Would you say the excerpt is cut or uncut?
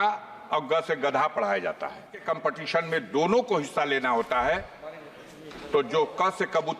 cut